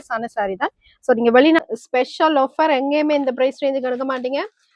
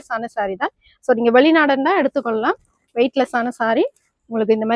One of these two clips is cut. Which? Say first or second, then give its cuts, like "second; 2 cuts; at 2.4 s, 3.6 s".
first; 1 cut; at 1.6 s